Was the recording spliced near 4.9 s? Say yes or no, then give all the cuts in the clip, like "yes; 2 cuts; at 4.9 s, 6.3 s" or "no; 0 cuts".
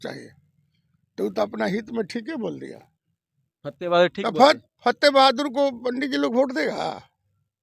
no; 0 cuts